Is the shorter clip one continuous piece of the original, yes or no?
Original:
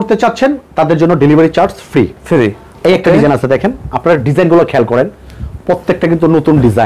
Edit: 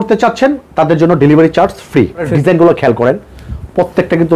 no